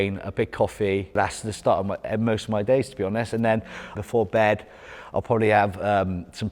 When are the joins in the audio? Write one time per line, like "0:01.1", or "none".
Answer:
0:01.1
0:03.9